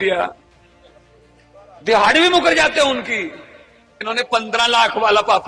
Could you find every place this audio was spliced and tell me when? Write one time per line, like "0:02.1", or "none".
0:04.0

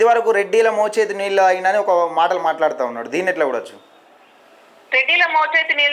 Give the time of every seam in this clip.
none

